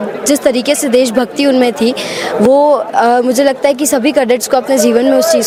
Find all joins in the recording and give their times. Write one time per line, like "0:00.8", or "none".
none